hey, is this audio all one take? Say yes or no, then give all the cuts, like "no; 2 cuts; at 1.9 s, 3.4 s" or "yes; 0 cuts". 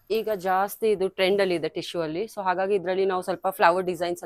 yes; 0 cuts